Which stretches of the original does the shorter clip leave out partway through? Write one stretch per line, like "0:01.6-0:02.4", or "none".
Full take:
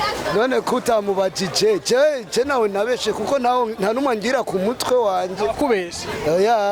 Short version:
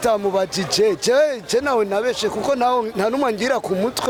none